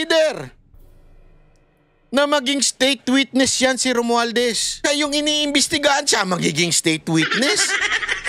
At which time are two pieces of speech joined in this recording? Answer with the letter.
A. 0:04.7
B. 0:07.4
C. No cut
A